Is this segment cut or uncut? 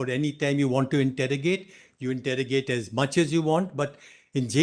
uncut